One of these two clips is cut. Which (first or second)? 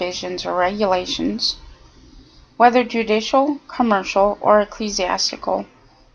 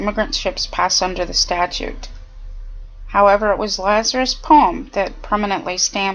second